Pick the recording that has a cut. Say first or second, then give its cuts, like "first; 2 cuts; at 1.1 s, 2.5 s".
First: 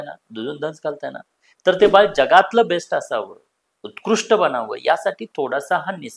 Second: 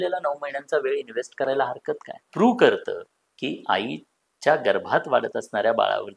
second; 1 cut; at 2.3 s